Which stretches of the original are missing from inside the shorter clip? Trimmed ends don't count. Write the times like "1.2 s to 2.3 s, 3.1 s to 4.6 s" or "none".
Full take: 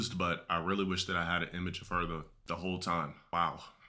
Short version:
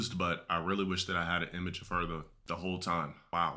none